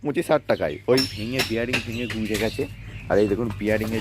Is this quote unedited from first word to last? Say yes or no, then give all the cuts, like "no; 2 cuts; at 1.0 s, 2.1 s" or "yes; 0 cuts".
no; 1 cut; at 1.1 s